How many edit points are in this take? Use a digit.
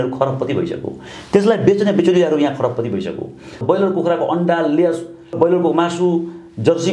1